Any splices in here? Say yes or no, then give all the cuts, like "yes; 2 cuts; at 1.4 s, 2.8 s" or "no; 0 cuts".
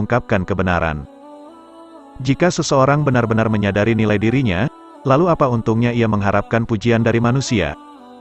yes; 1 cut; at 1.1 s